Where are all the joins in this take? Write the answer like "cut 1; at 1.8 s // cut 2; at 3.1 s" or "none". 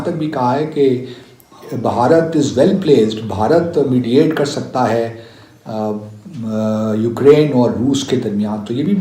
none

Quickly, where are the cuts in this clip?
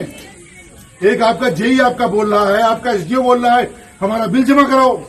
none

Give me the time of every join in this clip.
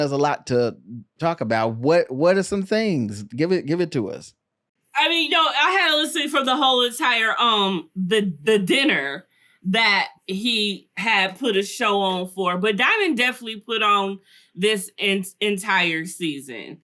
none

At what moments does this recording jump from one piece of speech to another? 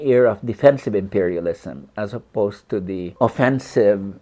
cut 1; at 3.1 s

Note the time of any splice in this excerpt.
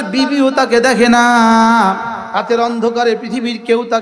cut 1; at 2.2 s

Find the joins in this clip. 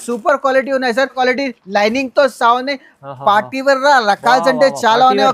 cut 1; at 1.2 s

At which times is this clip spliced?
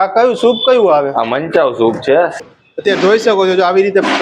cut 1; at 2.3 s

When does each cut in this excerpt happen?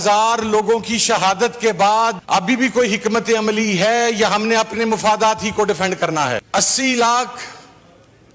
cut 1; at 2.2 s // cut 2; at 6.4 s

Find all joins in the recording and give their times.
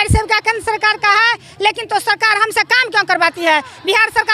none

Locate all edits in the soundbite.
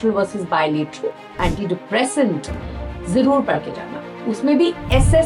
cut 1; at 1.3 s

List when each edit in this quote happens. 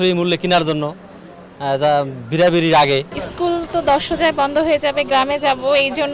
cut 1; at 3.2 s

